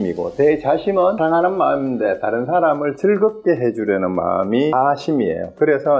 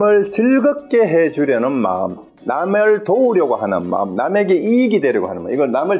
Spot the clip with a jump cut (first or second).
first